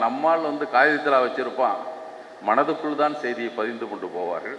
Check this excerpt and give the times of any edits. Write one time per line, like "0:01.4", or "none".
none